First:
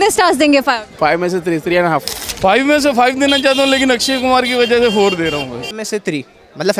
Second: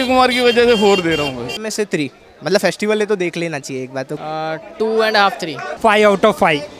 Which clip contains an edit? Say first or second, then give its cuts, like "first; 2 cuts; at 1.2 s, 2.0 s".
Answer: first; 1 cut; at 2.2 s